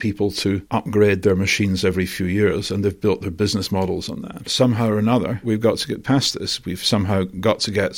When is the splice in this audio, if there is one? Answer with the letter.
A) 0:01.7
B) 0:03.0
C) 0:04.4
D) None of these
C